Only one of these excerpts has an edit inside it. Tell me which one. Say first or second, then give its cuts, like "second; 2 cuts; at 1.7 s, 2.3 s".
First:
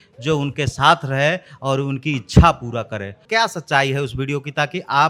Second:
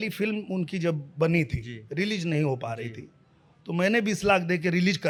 first; 1 cut; at 3.3 s